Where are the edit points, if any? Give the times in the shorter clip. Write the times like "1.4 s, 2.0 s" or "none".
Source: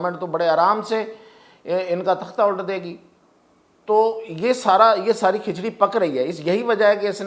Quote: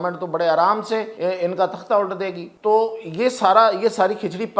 1.1 s, 2.4 s